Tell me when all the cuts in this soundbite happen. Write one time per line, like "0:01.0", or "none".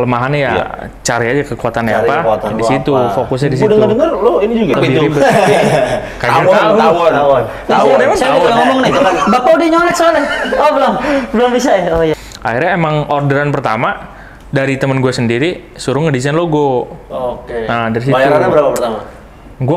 0:04.7
0:12.1